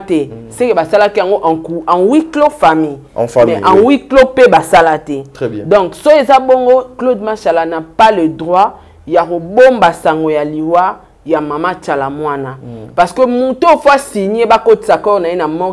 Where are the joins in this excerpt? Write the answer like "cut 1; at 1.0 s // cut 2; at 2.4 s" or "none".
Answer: none